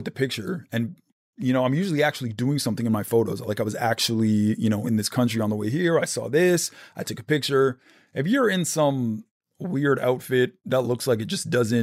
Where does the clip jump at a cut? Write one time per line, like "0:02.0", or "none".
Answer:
none